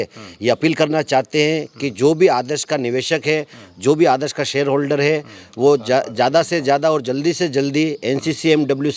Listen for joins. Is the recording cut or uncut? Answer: uncut